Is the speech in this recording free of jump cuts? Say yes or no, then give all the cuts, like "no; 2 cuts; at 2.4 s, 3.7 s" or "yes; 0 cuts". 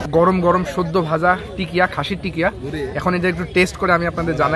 yes; 0 cuts